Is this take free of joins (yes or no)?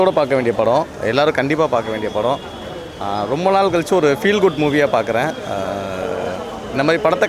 yes